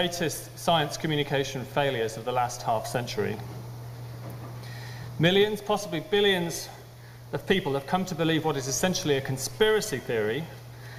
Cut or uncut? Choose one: uncut